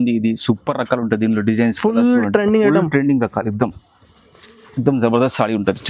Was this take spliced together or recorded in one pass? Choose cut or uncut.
uncut